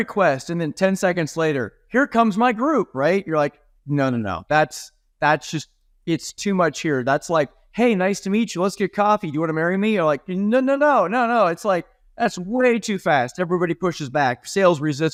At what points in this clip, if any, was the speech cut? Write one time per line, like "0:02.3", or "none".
none

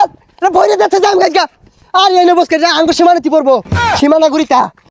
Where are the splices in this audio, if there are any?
none

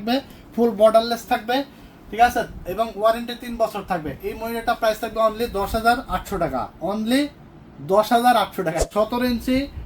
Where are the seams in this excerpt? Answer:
0:08.9

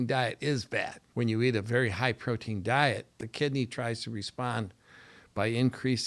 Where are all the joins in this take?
0:01.0
0:03.2

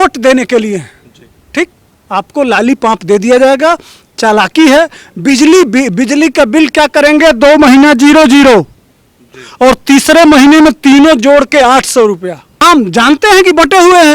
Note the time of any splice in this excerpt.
0:12.6

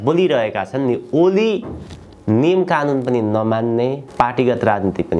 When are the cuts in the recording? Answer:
0:04.0

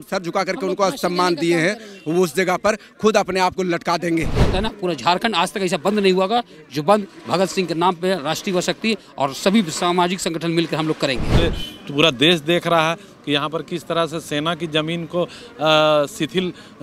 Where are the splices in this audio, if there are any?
0:04.5
0:11.3

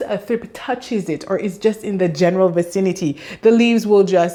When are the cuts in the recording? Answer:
none

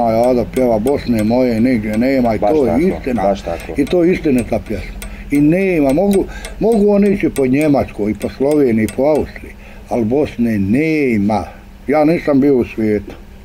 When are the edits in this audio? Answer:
none

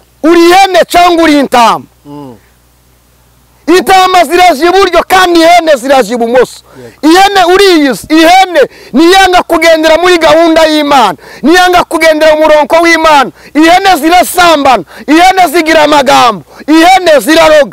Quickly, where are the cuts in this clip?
none

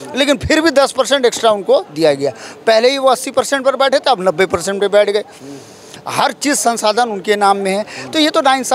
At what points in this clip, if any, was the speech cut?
none

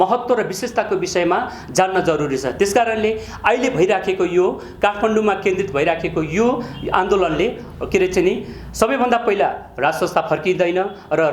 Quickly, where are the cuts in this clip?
none

